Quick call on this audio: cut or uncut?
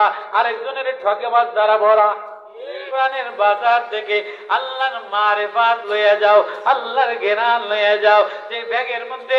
cut